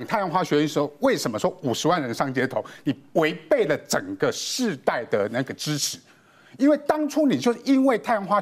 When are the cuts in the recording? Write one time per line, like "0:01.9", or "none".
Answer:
none